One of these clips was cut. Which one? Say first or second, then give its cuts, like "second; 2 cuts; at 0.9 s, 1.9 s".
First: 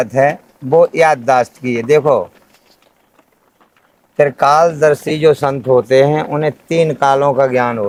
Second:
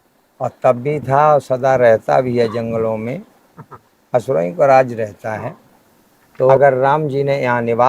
second; 1 cut; at 6.6 s